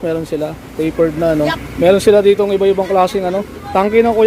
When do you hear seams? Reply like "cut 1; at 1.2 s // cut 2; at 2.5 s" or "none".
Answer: cut 1; at 1.6 s